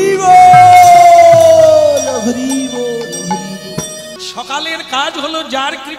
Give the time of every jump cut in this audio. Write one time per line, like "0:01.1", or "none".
0:04.1